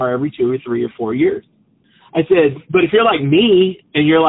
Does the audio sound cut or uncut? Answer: uncut